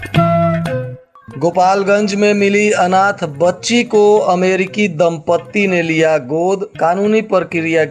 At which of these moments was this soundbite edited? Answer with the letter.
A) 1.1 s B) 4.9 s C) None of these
A